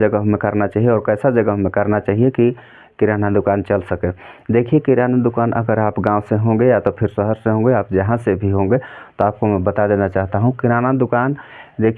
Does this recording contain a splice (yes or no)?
no